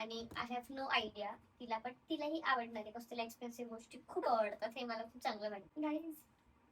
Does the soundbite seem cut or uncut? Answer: cut